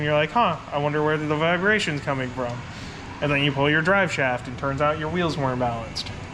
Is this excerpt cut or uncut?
uncut